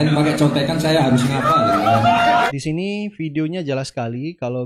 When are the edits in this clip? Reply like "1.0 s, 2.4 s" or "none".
2.5 s